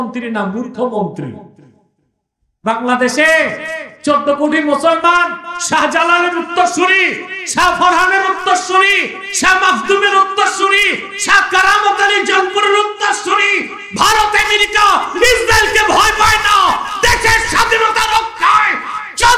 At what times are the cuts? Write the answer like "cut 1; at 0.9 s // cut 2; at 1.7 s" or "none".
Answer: cut 1; at 2.6 s